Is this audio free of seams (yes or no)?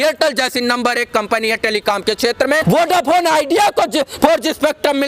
no